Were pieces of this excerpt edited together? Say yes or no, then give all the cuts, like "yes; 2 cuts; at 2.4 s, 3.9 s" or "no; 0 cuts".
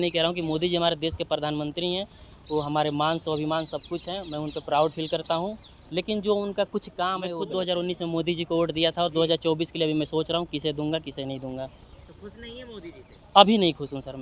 yes; 1 cut; at 7.4 s